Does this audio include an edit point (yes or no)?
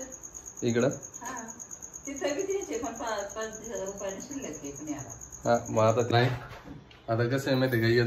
yes